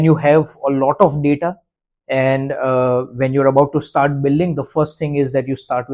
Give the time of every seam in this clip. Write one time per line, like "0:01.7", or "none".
none